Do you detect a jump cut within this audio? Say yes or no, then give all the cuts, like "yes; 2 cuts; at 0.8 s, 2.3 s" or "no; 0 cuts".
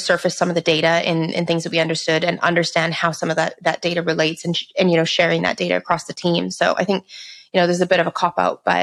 no; 0 cuts